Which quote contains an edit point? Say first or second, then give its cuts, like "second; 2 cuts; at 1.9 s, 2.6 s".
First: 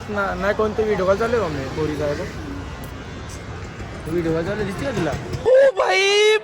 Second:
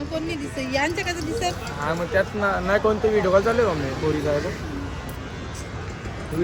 first; 1 cut; at 5.3 s